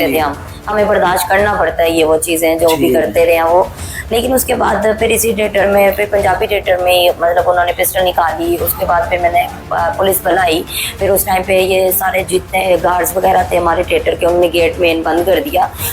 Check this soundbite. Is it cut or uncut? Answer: uncut